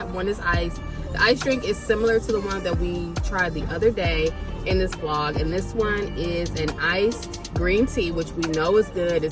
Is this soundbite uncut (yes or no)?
yes